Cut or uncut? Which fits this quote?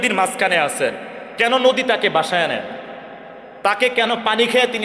uncut